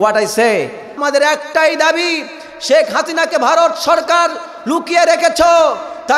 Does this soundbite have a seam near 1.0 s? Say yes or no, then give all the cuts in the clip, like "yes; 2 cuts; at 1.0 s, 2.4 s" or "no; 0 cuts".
yes; 1 cut; at 1.0 s